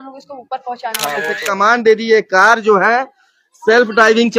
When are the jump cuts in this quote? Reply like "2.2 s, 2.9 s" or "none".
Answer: 1.4 s